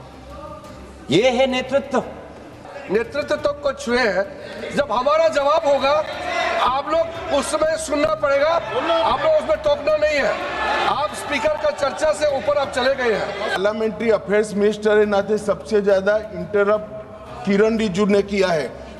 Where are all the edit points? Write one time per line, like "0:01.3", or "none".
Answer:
0:02.7
0:13.6

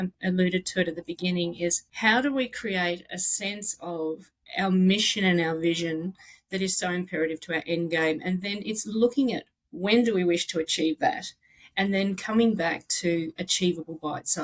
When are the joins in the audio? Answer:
0:01.9

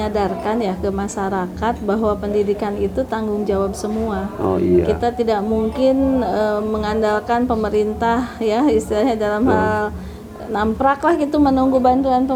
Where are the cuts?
none

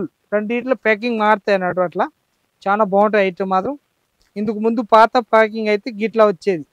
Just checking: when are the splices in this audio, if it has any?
none

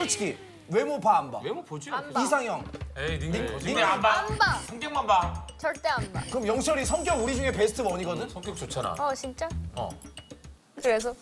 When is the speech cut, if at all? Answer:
none

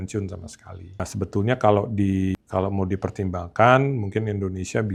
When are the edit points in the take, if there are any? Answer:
none

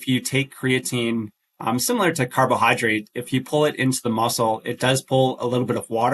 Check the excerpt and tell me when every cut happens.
none

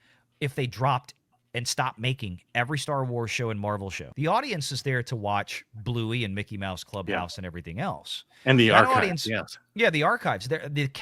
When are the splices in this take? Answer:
0:04.0

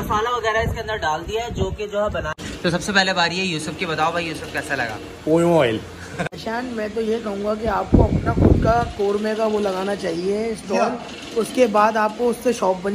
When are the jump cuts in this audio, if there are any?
0:02.4
0:06.2

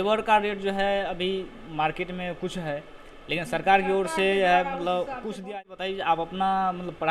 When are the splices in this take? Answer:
0:05.4

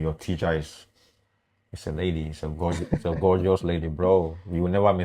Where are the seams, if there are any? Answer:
none

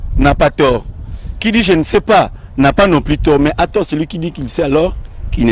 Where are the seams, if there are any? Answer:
none

